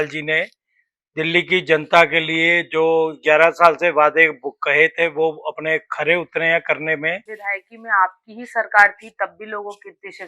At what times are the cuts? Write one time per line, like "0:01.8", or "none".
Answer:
0:07.3